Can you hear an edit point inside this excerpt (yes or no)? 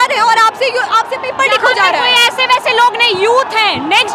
no